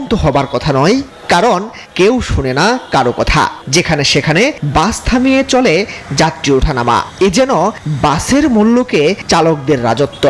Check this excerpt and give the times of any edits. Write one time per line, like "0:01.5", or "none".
none